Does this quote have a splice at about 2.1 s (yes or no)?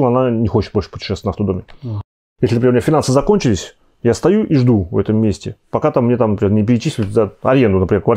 yes